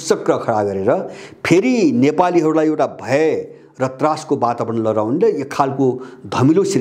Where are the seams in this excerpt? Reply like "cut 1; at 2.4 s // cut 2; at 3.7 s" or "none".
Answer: none